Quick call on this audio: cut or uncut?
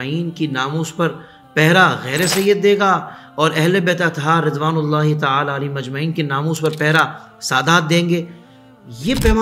uncut